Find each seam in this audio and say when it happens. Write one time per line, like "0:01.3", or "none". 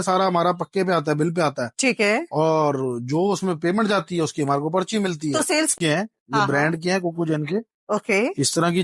0:05.7